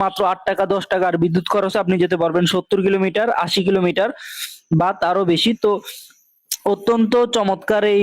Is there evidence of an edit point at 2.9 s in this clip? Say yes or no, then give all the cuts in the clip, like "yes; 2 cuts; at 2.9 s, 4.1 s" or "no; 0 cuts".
yes; 1 cut; at 2.9 s